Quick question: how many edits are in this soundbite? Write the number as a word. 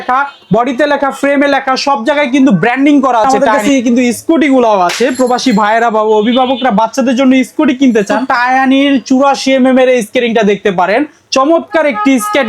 two